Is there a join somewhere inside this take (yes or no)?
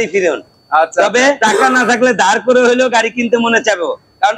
yes